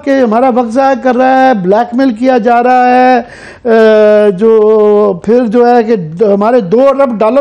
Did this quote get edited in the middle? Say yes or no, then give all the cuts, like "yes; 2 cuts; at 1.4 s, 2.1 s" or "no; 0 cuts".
no; 0 cuts